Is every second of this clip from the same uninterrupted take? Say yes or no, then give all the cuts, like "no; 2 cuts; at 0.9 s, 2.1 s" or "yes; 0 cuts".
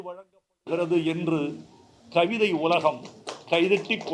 yes; 0 cuts